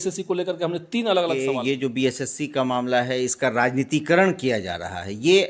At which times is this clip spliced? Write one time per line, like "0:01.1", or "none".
0:01.4